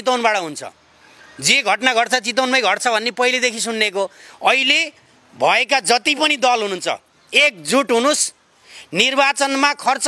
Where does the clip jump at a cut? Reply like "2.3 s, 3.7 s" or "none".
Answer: none

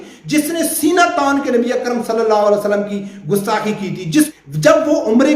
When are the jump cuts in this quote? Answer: 4.3 s

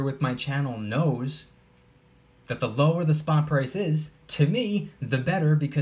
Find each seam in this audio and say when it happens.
none

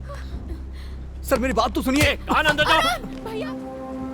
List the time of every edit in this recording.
3.1 s

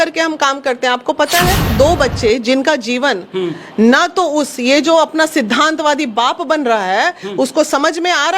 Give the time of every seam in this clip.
1.7 s

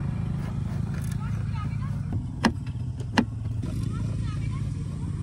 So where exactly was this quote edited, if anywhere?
none

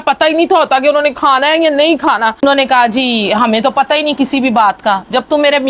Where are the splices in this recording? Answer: 2.4 s

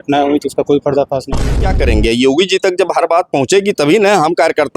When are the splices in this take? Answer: 1.7 s

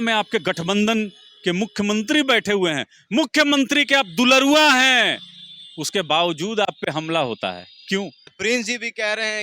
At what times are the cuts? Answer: 8.3 s

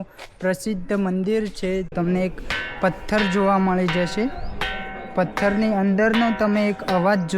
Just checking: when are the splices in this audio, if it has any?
1.9 s

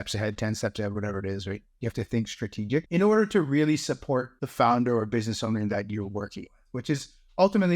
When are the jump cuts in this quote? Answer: 2.9 s, 4.4 s

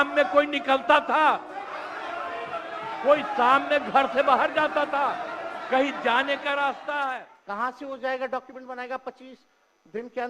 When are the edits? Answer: 7.2 s

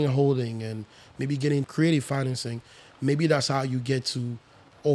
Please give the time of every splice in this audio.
1.7 s

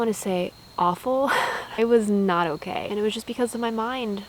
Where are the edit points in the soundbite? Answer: 1.8 s, 2.8 s

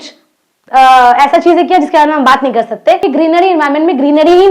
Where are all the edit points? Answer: 3.0 s

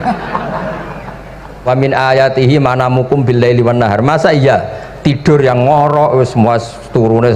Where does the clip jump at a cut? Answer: 1.6 s

